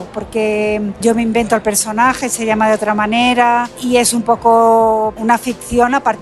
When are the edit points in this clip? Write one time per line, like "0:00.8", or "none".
0:01.0
0:03.7
0:05.2